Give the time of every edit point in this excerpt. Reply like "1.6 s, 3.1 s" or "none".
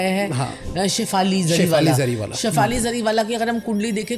none